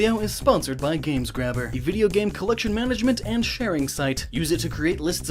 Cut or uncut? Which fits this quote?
cut